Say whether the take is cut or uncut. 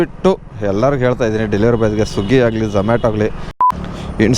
cut